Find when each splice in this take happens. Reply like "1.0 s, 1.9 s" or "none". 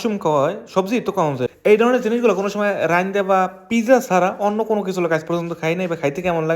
1.5 s